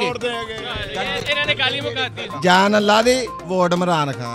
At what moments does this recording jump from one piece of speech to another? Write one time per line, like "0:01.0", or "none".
0:02.3